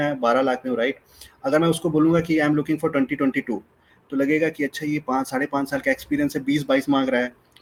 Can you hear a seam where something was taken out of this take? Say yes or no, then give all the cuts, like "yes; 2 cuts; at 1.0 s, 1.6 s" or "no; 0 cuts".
no; 0 cuts